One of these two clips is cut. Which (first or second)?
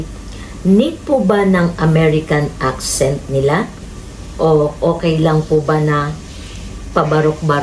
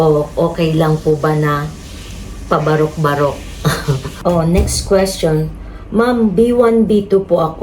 second